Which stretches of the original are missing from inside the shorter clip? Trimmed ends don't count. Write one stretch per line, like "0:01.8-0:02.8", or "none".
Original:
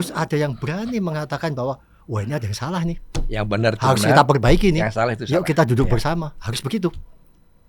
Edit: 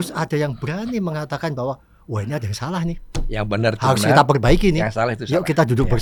none